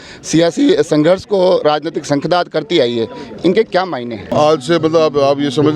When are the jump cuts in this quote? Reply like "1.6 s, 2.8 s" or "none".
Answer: 4.3 s